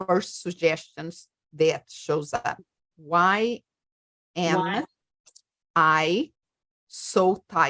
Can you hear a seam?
yes; 1 cut; at 2.9 s

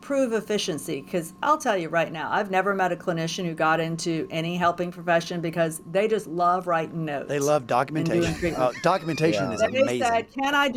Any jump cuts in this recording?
no; 0 cuts

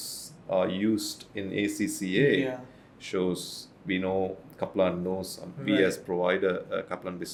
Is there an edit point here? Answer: no; 0 cuts

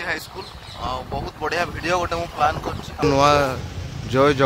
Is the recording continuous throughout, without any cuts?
no; 1 cut; at 3.0 s

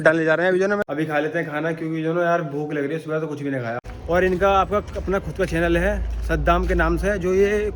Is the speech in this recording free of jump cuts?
no; 2 cuts; at 0.8 s, 3.8 s

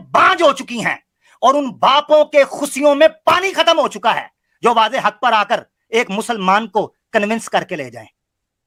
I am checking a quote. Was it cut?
no; 0 cuts

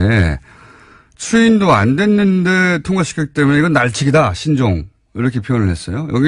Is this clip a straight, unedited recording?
yes; 0 cuts

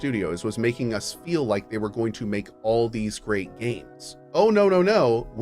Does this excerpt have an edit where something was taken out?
yes; 1 cut; at 4.2 s

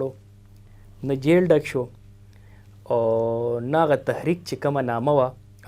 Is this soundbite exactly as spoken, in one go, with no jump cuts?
yes; 0 cuts

